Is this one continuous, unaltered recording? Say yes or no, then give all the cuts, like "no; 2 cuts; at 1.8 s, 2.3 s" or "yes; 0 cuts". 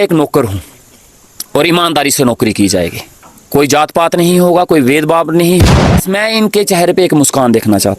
no; 1 cut; at 5.6 s